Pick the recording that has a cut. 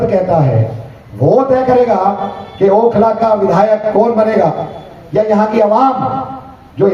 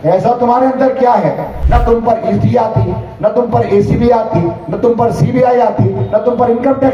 second; 1 cut; at 1.5 s

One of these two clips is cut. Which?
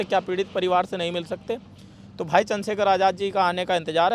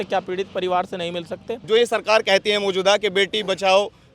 second; 1 cut; at 1.5 s

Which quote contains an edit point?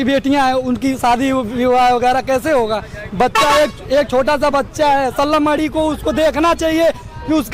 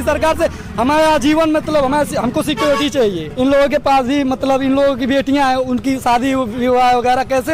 second; 1 cut; at 3.3 s

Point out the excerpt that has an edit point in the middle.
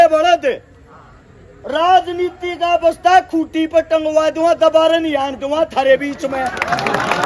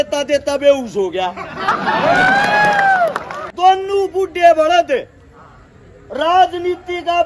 second; 1 cut; at 3.5 s

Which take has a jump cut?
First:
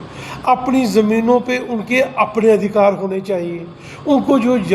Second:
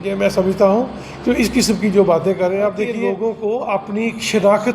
second; 1 cut; at 3.0 s

